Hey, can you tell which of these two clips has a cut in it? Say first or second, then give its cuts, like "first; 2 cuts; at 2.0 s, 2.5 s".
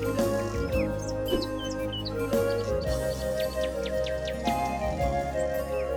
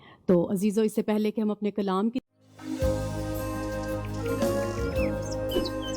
second; 1 cut; at 2.2 s